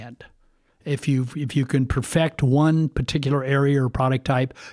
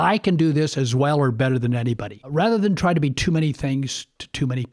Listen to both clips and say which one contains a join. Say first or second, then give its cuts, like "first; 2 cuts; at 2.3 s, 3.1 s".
second; 1 cut; at 2.3 s